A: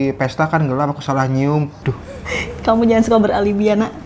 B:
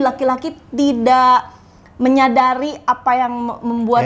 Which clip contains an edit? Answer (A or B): A